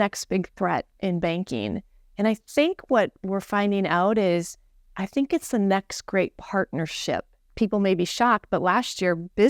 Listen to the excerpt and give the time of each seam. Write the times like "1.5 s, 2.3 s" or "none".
7.5 s